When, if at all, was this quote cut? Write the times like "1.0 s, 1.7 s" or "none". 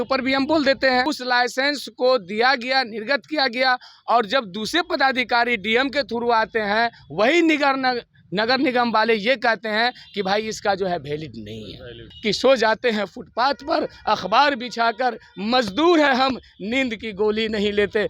1.0 s, 12.1 s